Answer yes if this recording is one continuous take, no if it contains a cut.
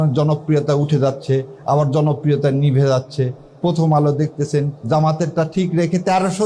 no